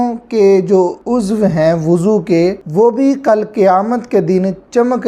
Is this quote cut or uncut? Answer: uncut